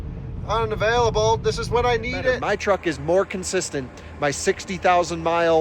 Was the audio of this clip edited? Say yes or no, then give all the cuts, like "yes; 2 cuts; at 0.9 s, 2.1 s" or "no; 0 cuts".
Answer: yes; 1 cut; at 2.4 s